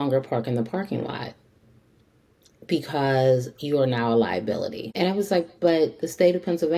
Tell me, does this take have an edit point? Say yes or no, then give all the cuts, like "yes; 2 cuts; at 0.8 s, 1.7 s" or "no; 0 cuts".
yes; 1 cut; at 4.8 s